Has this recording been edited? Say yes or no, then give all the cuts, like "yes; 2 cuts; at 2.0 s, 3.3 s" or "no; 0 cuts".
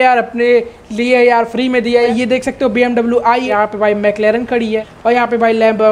yes; 3 cuts; at 2.1 s, 3.5 s, 4.9 s